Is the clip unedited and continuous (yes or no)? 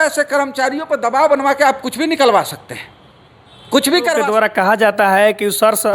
no